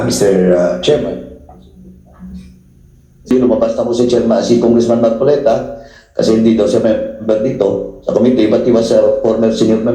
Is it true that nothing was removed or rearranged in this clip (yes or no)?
no